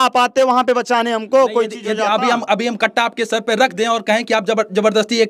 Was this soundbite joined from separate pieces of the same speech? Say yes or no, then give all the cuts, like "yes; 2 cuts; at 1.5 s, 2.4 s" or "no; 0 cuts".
no; 0 cuts